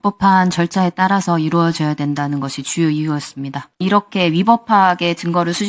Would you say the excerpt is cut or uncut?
cut